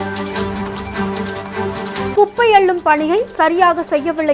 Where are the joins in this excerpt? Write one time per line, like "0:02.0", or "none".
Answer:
0:02.1

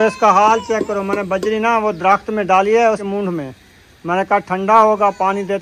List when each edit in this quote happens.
0:03.0

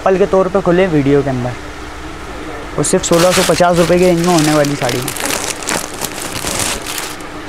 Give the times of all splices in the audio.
none

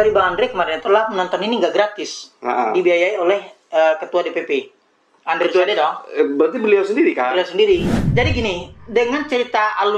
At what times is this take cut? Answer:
0:08.0

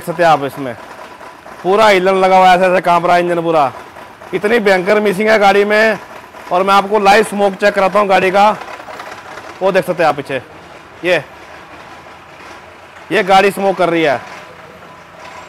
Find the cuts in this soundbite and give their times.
none

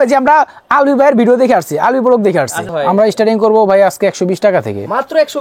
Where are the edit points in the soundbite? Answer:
0:02.6

